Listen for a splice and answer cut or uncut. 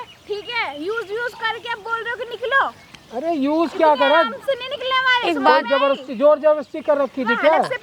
uncut